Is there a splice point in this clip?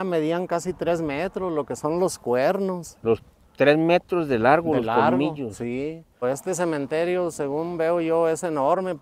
yes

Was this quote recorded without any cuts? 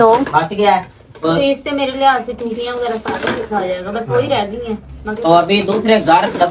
yes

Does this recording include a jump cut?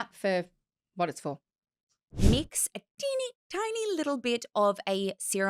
yes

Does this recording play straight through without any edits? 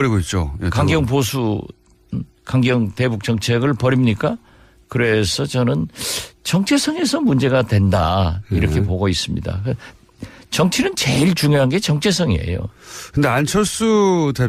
yes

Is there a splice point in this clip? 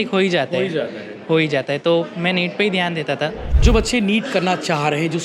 yes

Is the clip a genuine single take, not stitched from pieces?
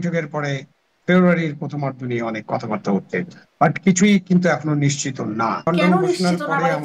no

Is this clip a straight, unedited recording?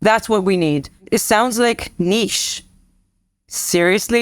no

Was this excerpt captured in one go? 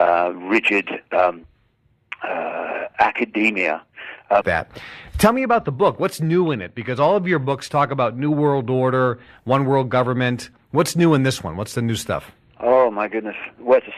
yes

